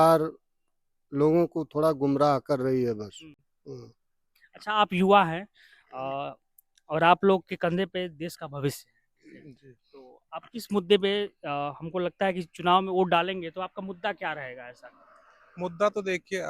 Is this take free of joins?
yes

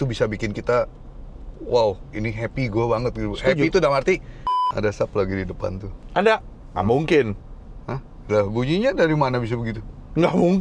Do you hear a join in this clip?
yes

